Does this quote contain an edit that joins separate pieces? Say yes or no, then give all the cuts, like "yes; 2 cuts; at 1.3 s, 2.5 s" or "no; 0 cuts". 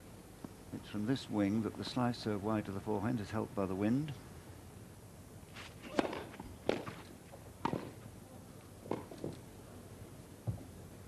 no; 0 cuts